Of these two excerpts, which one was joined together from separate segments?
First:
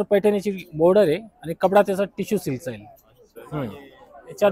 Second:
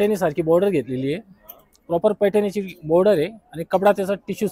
first; 1 cut; at 3.4 s

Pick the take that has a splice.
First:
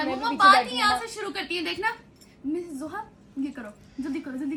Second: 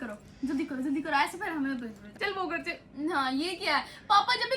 second; 1 cut; at 2.1 s

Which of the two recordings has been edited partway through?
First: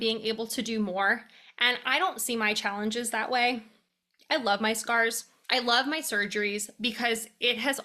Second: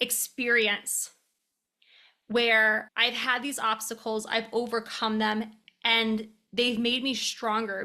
first; 1 cut; at 5.3 s

